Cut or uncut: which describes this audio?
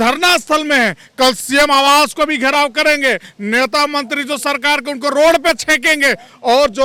uncut